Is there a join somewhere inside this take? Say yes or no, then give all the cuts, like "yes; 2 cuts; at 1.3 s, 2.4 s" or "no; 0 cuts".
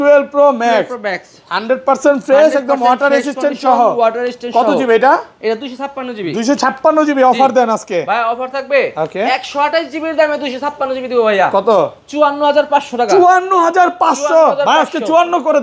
no; 0 cuts